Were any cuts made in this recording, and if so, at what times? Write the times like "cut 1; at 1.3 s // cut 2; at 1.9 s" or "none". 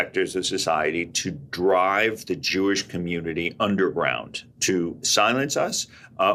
none